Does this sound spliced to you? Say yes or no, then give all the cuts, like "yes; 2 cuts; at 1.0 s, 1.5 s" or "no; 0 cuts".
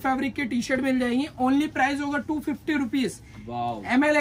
no; 0 cuts